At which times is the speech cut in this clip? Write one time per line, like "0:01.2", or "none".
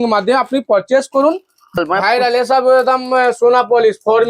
0:01.8